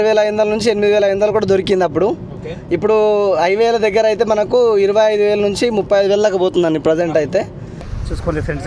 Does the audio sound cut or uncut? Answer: cut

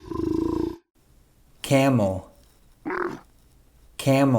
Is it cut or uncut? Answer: cut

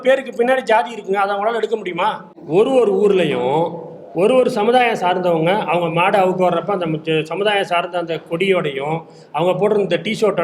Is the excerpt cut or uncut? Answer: cut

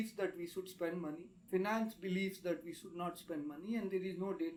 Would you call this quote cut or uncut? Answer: uncut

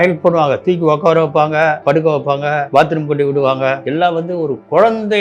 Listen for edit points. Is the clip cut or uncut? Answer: cut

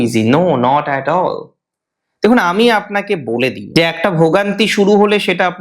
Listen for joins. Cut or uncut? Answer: cut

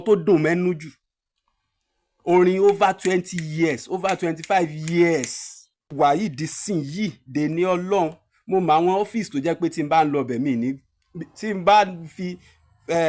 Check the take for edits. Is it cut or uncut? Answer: cut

